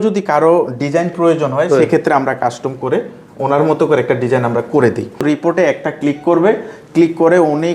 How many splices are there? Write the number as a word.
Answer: one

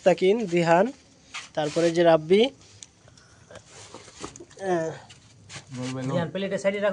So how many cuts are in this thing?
zero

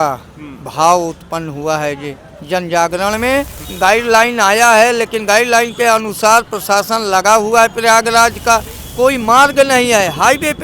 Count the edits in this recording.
two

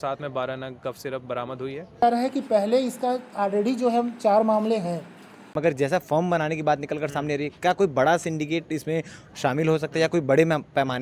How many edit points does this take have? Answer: two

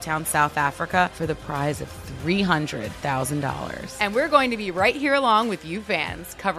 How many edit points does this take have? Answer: one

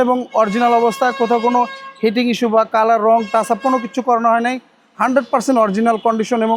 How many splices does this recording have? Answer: zero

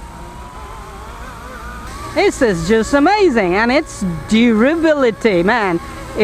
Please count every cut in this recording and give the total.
one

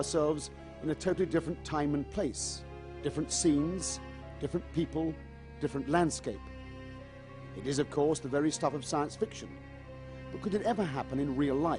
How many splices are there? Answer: one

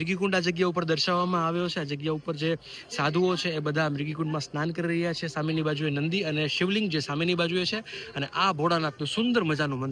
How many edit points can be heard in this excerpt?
zero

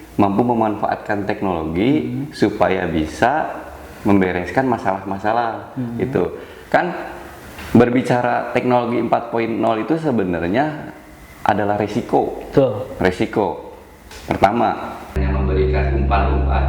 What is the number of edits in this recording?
one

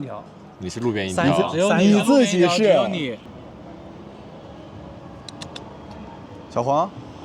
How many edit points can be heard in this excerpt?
one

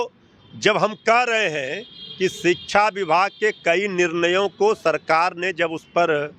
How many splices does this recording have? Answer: zero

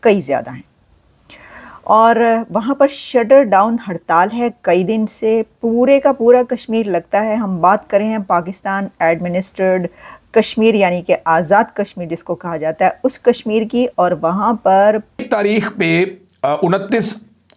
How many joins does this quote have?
one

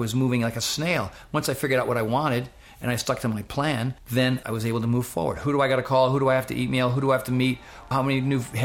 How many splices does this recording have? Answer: two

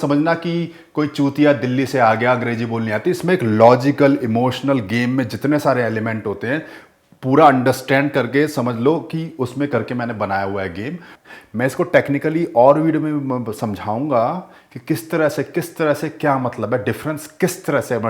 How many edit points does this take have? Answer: one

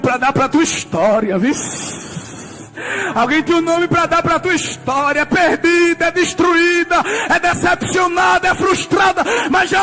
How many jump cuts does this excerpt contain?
zero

